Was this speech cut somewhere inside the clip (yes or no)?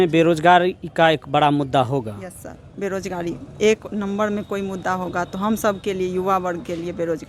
no